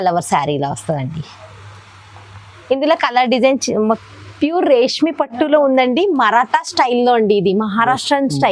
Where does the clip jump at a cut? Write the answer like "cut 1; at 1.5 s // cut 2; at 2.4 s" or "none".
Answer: cut 1; at 4.0 s